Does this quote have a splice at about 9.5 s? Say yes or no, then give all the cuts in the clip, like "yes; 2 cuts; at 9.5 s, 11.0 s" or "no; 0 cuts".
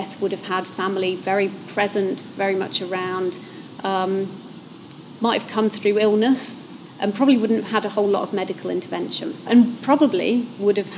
yes; 1 cut; at 9.5 s